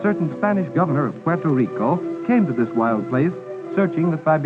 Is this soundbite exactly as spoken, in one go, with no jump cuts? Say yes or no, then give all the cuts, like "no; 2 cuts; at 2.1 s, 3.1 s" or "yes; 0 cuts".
yes; 0 cuts